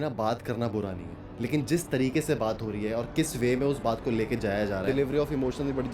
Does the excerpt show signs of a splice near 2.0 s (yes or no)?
no